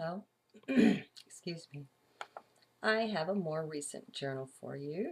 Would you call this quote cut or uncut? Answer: uncut